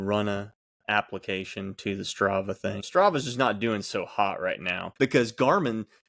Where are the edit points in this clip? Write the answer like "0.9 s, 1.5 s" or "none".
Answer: 2.8 s, 4.8 s